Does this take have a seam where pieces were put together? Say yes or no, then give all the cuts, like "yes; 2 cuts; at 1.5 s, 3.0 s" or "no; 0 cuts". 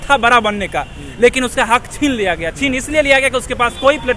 no; 0 cuts